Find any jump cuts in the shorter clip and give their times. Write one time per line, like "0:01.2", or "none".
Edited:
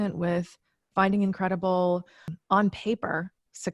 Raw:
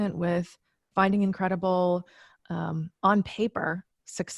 0:02.3